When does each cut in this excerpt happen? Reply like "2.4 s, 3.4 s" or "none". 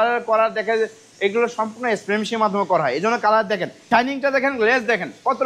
3.7 s